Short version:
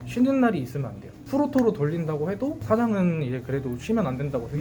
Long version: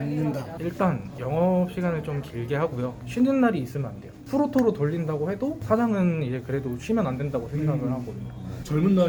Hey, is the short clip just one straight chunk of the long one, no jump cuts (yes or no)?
yes